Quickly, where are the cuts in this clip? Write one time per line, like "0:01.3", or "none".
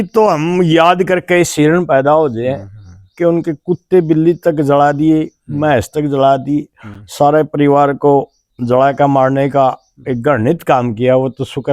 none